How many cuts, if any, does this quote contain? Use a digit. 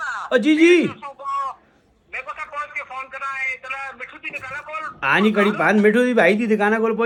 0